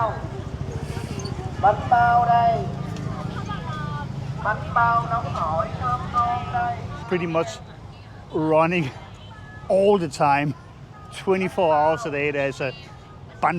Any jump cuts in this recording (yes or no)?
yes